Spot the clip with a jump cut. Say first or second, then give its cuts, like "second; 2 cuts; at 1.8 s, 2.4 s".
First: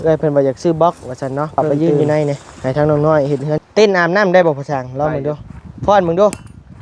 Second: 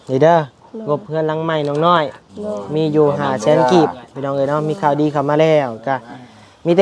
first; 1 cut; at 3.6 s